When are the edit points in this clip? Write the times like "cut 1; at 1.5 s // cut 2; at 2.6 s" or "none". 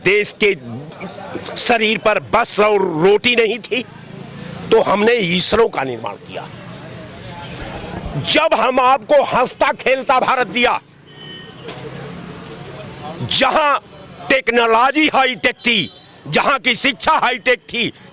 none